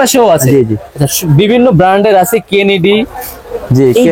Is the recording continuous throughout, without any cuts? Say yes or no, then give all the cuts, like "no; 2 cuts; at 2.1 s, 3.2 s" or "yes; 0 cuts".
yes; 0 cuts